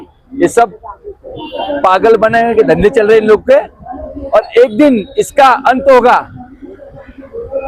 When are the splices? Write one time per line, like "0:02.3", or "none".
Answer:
none